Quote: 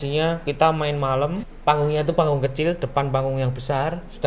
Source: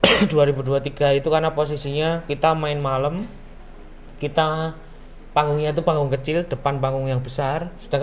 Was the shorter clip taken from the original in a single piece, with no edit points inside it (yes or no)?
no